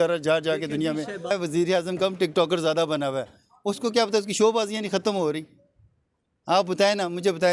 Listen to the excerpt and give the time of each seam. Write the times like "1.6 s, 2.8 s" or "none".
1.3 s